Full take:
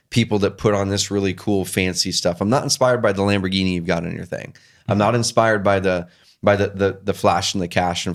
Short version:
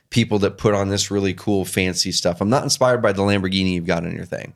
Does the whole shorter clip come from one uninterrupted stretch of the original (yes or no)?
yes